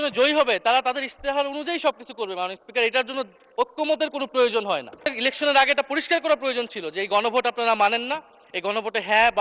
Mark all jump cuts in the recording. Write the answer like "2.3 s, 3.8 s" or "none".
5.1 s